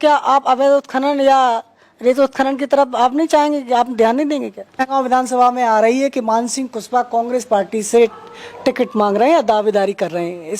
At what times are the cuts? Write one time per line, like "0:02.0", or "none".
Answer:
0:04.9